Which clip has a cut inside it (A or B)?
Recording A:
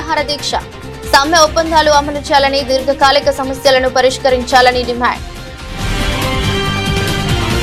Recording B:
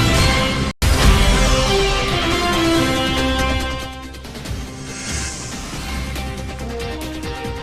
B